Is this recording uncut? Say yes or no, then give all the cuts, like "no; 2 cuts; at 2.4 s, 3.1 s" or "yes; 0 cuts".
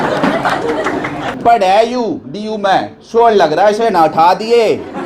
no; 1 cut; at 1.2 s